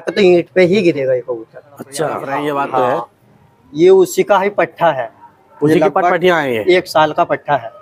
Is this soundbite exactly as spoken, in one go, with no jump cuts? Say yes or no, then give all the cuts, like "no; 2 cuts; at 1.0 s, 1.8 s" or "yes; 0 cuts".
no; 1 cut; at 2.3 s